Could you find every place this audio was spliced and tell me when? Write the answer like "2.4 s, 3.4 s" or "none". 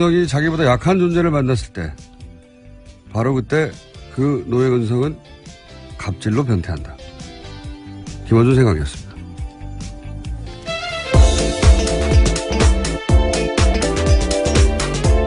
13.0 s